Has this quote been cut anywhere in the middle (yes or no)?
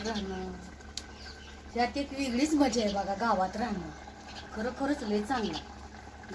no